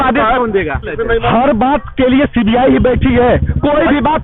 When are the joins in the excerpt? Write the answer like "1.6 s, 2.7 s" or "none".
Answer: 0.9 s